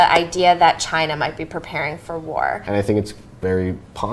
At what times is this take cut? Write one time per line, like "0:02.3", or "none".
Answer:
0:02.6